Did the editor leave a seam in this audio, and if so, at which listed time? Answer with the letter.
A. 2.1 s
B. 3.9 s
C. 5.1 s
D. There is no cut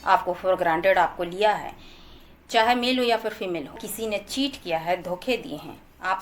B